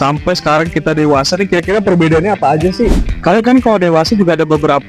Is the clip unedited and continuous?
no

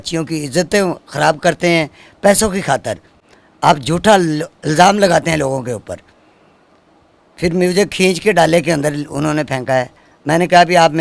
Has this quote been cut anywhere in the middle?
no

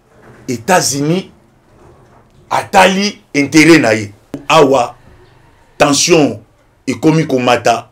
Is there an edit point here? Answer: yes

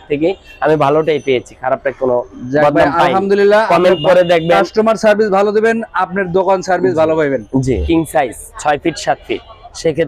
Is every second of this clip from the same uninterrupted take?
no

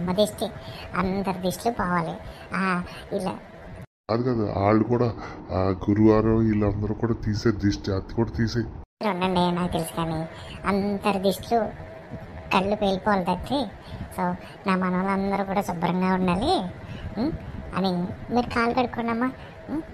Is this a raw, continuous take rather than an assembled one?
yes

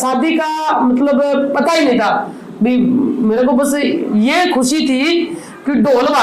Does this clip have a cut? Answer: no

